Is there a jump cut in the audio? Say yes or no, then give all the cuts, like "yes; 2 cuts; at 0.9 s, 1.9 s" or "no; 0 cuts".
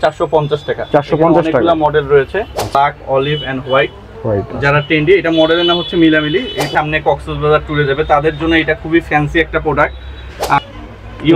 yes; 3 cuts; at 2.7 s, 6.7 s, 10.6 s